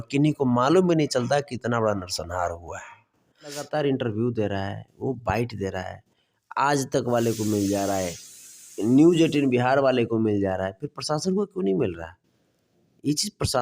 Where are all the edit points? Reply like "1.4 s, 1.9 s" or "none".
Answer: 3.7 s